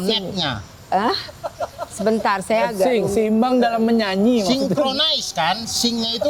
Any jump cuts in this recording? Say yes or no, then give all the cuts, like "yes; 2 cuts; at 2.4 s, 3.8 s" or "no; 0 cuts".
no; 0 cuts